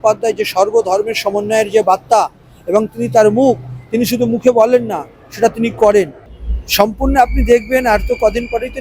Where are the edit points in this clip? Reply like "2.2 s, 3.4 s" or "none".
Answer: 6.2 s